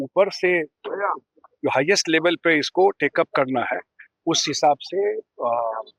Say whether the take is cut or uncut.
uncut